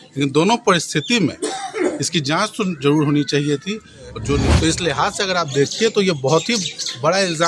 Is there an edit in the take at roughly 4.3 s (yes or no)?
yes